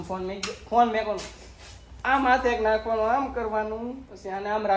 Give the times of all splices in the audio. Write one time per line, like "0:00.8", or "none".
none